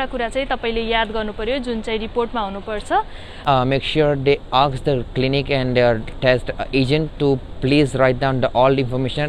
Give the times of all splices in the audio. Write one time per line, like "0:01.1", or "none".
0:03.4